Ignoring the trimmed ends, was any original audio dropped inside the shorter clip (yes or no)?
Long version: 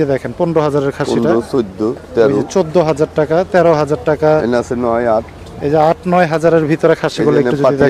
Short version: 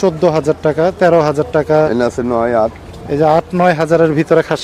no